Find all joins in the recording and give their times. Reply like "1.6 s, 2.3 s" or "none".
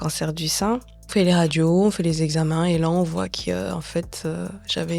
1.0 s